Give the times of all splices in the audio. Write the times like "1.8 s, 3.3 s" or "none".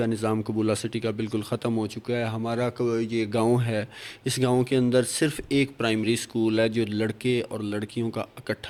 none